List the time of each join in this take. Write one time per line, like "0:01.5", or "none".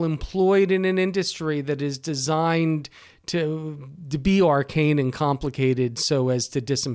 none